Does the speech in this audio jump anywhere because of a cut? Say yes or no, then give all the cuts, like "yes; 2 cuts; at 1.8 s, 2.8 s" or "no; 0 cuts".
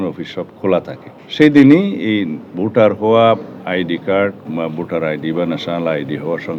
no; 0 cuts